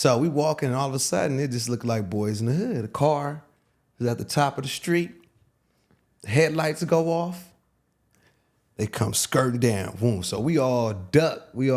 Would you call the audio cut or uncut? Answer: uncut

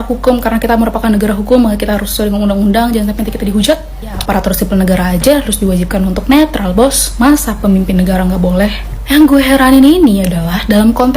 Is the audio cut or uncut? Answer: cut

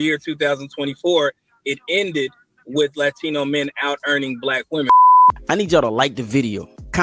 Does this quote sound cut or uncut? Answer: cut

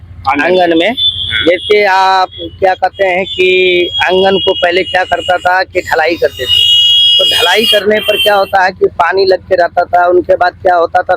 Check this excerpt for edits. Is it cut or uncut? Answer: uncut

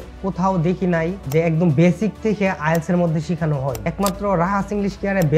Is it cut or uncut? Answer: cut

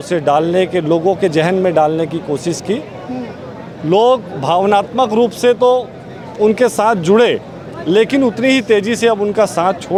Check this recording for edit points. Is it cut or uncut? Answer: uncut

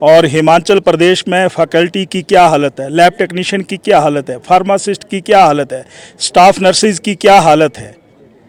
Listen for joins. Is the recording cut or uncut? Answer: uncut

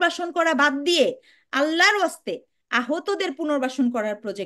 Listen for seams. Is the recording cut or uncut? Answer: uncut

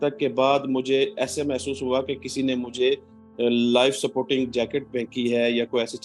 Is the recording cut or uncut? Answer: uncut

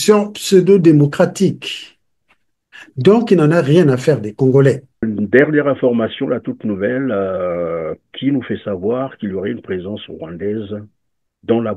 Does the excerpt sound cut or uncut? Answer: cut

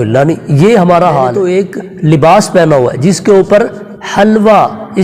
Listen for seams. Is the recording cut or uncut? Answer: cut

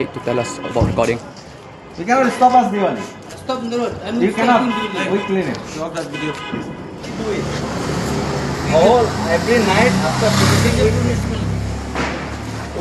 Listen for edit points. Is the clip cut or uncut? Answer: cut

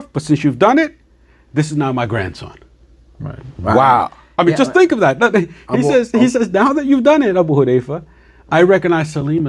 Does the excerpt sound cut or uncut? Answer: uncut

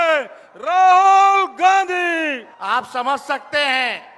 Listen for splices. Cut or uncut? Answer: cut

